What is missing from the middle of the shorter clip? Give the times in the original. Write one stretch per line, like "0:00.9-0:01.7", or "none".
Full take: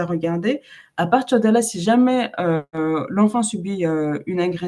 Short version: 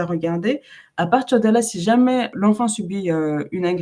0:02.3-0:03.1